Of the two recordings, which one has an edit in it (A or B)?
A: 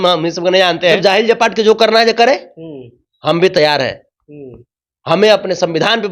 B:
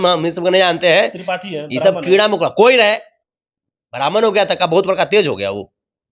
A